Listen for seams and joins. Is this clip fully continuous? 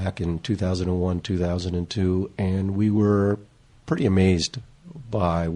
yes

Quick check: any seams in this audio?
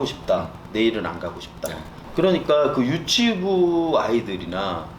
yes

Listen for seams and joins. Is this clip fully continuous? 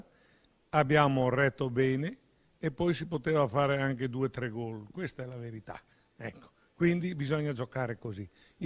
yes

